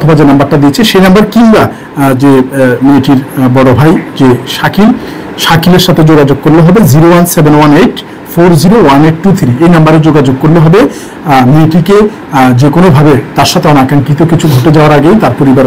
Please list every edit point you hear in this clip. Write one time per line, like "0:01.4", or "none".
none